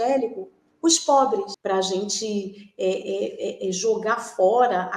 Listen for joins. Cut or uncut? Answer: cut